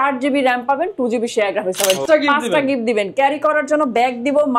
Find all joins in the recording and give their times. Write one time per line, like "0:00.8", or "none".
0:02.0